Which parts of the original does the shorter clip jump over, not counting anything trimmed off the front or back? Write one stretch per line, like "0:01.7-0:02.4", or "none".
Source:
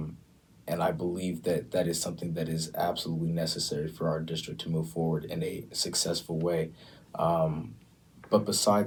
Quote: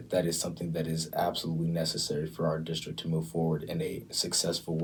none